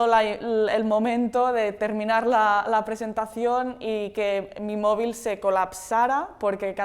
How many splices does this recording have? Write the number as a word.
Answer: zero